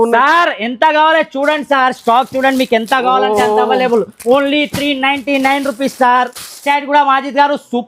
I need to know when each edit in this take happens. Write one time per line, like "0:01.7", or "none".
0:06.6